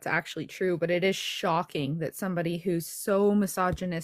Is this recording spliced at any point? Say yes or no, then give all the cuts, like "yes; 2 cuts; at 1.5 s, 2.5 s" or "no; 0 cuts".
no; 0 cuts